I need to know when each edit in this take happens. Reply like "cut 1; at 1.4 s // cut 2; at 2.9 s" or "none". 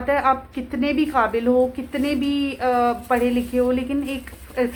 none

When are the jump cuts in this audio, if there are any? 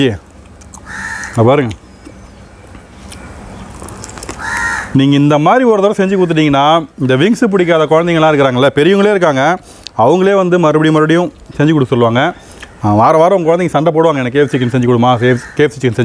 cut 1; at 4.9 s

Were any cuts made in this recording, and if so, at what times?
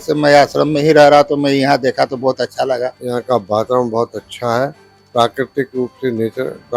cut 1; at 3.0 s

